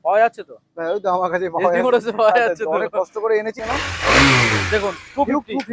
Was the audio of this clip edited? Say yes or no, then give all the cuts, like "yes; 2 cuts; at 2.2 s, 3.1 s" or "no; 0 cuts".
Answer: yes; 1 cut; at 3.5 s